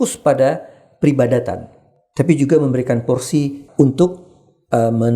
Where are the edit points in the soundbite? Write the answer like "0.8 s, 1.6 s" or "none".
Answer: 3.6 s